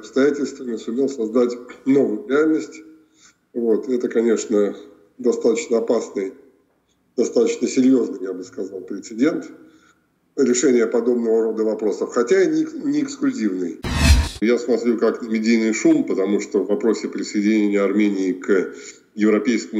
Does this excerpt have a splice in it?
yes; 1 cut; at 13.9 s

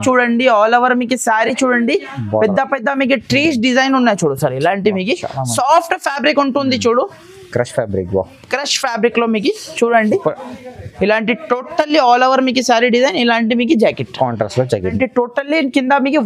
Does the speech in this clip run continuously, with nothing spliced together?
no; 1 cut; at 14.9 s

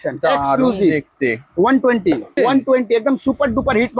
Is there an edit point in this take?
yes; 1 cut; at 2.3 s

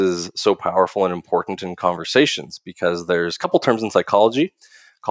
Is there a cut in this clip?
no; 0 cuts

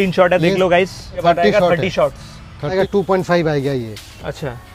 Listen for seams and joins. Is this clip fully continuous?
no; 2 cuts; at 1.2 s, 2.7 s

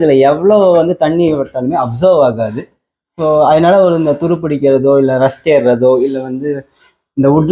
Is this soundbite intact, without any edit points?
yes; 0 cuts

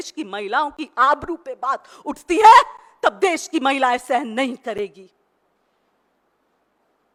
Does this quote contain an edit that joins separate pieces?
no; 0 cuts

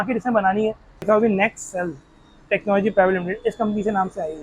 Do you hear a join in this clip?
yes; 1 cut; at 1.0 s

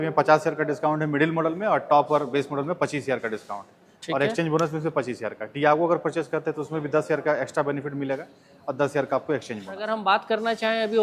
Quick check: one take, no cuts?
no; 1 cut; at 9.9 s

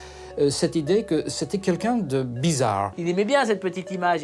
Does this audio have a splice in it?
yes; 1 cut; at 3.0 s

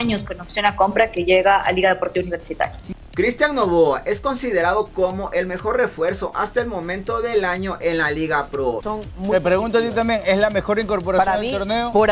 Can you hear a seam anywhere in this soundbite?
yes; 2 cuts; at 2.8 s, 8.8 s

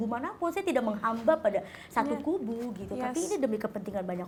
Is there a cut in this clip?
no; 0 cuts

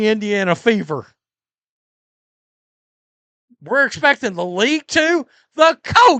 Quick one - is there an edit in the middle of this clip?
no; 0 cuts

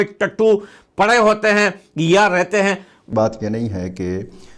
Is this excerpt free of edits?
no; 1 cut; at 3.1 s

